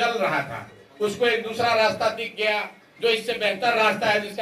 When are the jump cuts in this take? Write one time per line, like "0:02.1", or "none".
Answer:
none

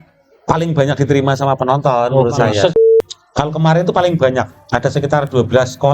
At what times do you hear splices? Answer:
0:02.8

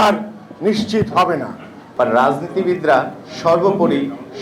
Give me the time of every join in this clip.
0:01.8

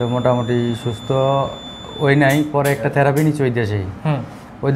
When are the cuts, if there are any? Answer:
none

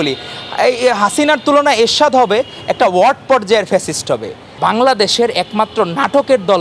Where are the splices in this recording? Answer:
0:04.5

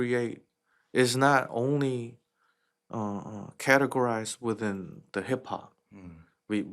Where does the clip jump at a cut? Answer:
none

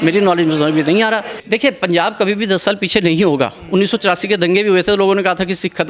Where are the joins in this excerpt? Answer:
0:01.3

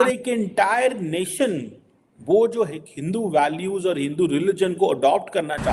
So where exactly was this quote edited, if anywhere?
none

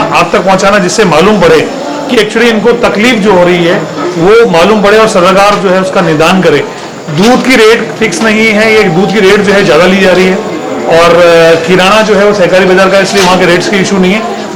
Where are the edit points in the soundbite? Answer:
none

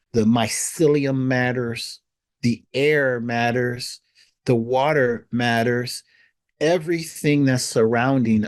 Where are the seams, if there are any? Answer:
none

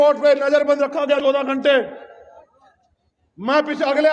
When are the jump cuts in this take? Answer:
0:01.2

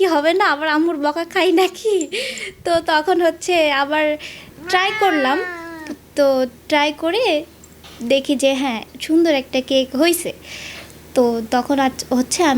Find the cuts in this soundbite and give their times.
none

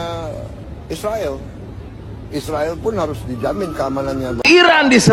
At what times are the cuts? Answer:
none

